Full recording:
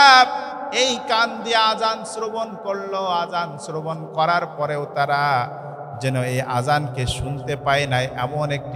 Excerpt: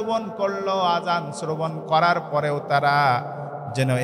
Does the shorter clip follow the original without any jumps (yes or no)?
yes